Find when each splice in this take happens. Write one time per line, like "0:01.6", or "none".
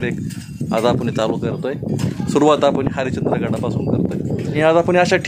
0:02.1
0:04.6